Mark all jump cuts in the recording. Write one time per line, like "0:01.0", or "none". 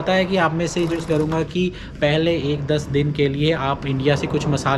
0:01.0